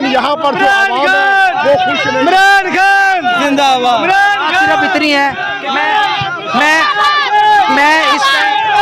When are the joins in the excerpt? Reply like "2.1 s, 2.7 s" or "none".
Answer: 5.5 s